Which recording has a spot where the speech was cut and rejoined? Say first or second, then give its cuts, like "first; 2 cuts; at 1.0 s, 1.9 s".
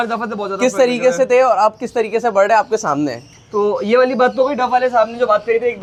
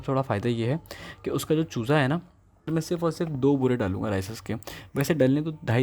second; 1 cut; at 2.7 s